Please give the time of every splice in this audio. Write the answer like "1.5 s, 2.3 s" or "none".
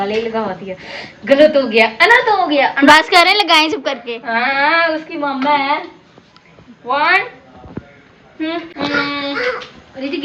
none